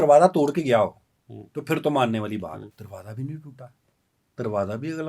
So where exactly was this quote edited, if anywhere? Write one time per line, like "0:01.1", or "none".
0:02.8